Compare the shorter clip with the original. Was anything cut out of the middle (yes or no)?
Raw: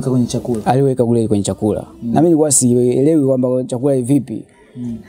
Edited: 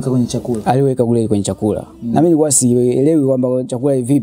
no